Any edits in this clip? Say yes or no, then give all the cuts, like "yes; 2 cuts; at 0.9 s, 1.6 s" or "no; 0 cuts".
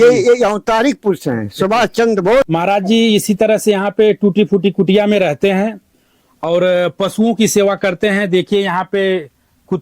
yes; 1 cut; at 2.5 s